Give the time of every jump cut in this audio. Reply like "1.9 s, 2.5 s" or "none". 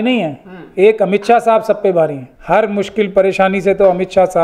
2.3 s